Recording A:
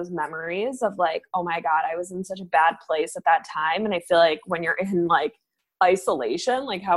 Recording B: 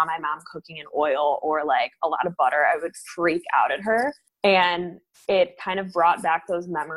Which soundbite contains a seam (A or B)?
B